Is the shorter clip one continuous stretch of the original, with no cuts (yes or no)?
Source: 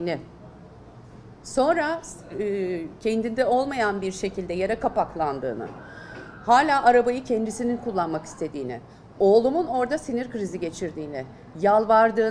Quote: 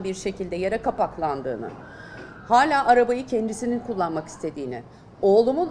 yes